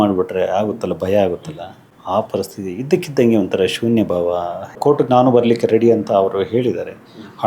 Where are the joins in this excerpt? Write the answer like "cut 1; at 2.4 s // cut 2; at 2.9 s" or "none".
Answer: cut 1; at 4.8 s